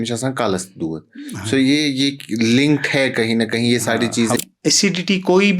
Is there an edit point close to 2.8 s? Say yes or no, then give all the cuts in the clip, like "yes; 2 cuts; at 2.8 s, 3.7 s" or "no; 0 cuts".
no; 1 cut; at 4.4 s